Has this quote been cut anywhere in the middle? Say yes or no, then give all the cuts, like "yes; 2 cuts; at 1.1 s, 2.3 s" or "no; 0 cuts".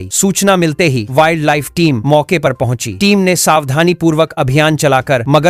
no; 0 cuts